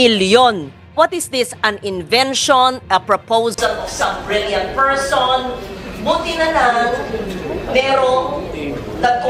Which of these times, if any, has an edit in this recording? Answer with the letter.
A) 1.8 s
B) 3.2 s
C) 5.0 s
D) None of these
D